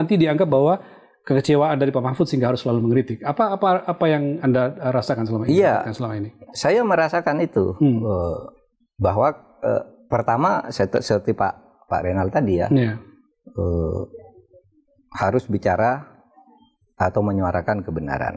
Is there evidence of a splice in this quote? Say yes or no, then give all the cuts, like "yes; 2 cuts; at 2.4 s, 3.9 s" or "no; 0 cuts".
no; 0 cuts